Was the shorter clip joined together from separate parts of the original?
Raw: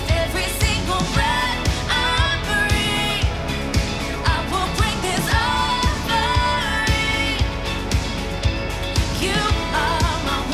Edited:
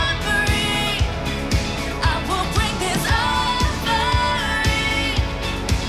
no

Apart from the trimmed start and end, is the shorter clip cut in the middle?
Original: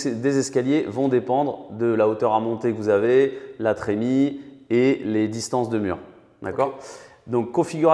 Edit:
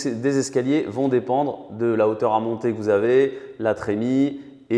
no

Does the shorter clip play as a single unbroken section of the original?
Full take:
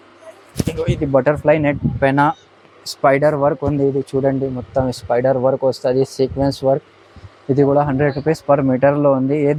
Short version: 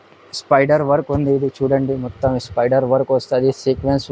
yes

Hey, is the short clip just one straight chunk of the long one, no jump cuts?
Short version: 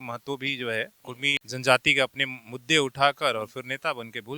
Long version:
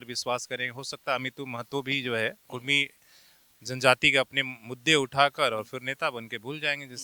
no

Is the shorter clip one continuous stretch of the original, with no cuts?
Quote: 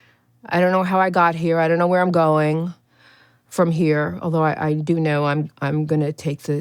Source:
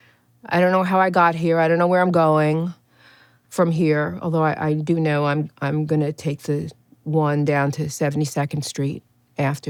yes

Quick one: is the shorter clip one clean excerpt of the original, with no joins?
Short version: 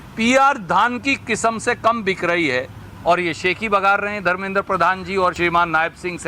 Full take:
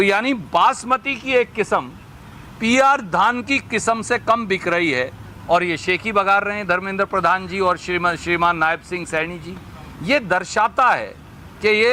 no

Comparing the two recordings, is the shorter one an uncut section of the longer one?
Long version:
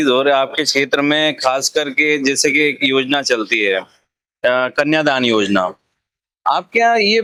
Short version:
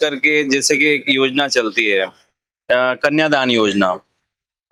yes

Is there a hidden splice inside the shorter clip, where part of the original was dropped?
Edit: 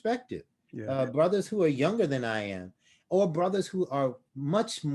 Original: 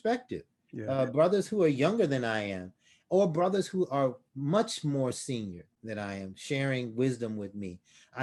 no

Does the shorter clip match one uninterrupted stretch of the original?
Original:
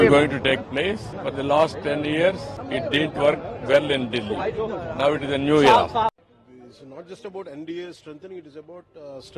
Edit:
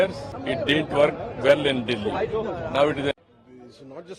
no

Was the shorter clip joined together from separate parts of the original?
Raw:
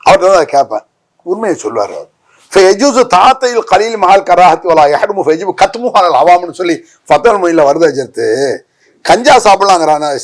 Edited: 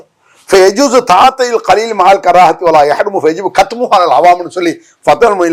no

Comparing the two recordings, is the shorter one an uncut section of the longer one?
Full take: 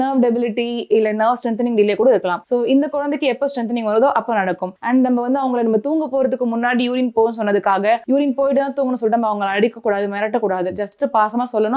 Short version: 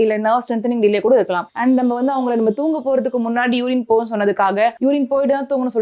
no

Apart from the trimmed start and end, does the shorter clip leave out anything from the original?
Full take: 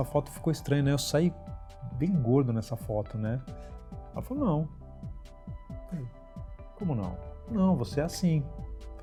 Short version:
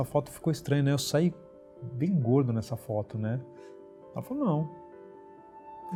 no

